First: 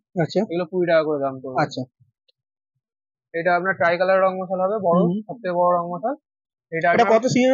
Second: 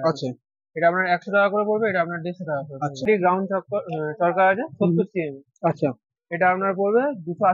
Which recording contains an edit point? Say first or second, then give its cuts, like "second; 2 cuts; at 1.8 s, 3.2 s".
second; 1 cut; at 3.1 s